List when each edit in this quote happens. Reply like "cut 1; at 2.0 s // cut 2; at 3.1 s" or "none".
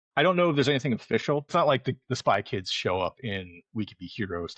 cut 1; at 1.5 s